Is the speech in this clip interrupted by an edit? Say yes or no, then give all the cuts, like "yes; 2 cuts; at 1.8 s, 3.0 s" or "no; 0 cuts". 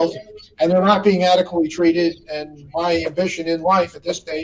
no; 0 cuts